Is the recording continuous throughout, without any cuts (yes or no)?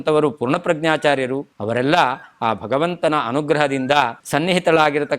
no